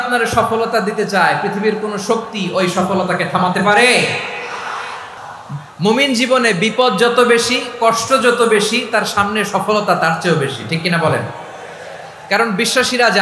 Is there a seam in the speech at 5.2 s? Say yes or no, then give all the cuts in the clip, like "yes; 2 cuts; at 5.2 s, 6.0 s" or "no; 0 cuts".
yes; 1 cut; at 5.2 s